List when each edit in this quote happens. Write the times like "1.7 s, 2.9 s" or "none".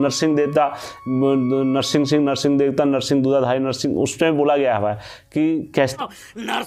none